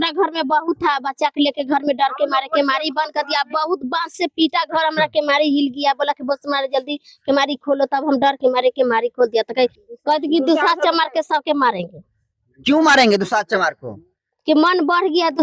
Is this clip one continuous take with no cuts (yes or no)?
no